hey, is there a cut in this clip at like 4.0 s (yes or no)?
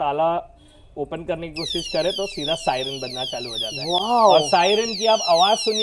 no